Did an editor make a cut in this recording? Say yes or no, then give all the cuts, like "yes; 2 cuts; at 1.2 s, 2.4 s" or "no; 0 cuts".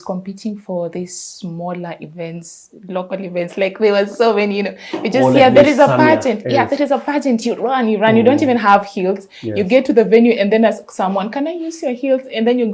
no; 0 cuts